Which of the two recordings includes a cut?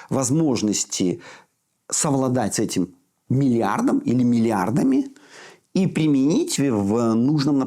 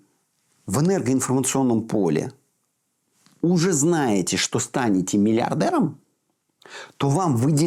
first; 1 cut; at 6.5 s

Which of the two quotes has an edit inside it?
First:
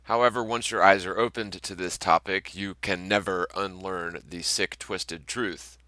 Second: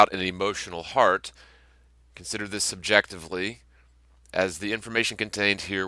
second; 1 cut; at 4.2 s

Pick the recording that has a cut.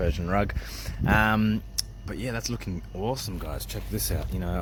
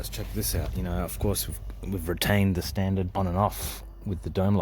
second; 1 cut; at 3.1 s

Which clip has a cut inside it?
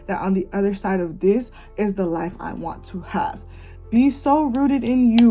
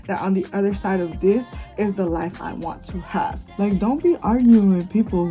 second; 1 cut; at 3.4 s

